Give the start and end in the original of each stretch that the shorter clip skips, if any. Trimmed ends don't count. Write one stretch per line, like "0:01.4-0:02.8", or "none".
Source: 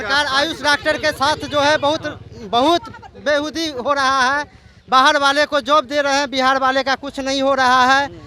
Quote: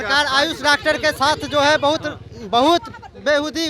none